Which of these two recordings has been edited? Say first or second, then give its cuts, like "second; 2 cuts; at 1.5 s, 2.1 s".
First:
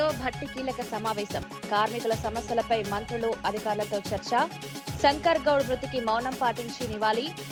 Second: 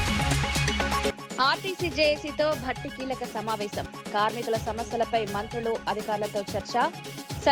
second; 1 cut; at 1.1 s